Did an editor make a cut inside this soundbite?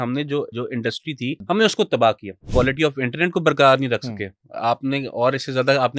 yes; 2 cuts; at 0.9 s, 2.4 s

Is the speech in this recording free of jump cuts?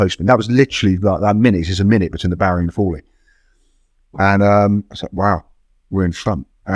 yes; 0 cuts

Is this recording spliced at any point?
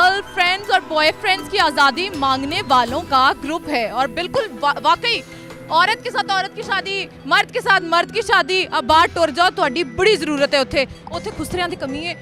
no; 0 cuts

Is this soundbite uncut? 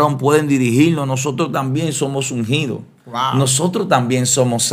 yes; 0 cuts

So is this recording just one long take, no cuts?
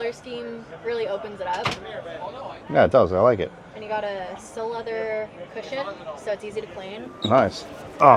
yes; 0 cuts

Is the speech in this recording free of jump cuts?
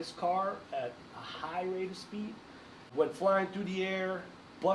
no; 1 cut; at 2.9 s

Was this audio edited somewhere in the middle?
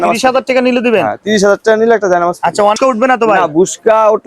yes; 1 cut; at 2.8 s

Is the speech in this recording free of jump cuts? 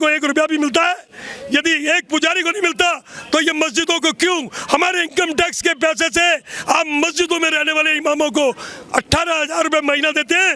yes; 0 cuts

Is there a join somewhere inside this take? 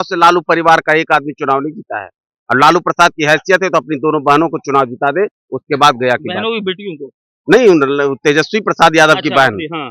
no; 0 cuts

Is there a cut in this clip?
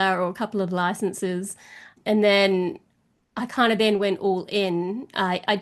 yes; 1 cut; at 1.9 s

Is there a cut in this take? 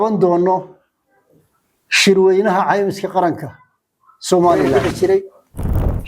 yes; 1 cut; at 4.7 s

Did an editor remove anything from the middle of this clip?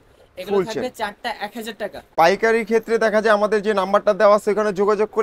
yes; 1 cut; at 2.1 s

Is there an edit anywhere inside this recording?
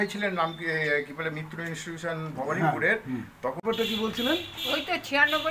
yes; 1 cut; at 3.6 s

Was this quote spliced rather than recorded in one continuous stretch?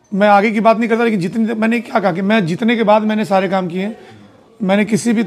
yes; 1 cut; at 4.1 s

